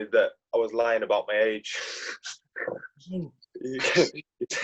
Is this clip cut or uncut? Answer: uncut